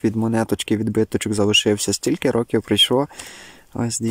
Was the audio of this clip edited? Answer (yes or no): no